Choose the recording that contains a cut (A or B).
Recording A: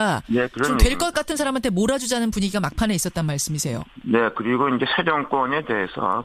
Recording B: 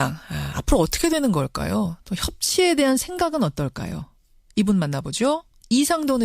B